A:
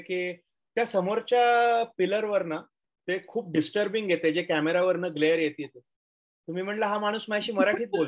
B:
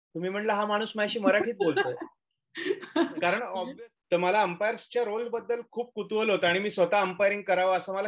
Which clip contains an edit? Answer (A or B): B